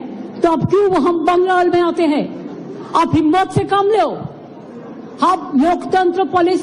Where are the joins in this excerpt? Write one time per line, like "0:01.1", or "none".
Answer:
0:00.9